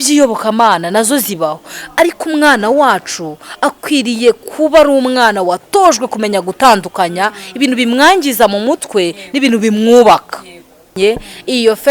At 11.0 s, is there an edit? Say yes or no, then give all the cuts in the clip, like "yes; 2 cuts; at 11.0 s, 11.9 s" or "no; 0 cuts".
yes; 1 cut; at 11.0 s